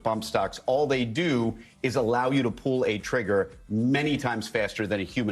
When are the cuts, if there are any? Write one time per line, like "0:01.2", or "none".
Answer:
none